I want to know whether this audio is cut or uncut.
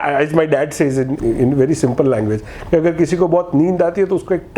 cut